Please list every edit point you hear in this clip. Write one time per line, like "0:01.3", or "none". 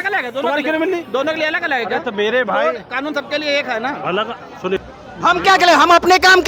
0:04.8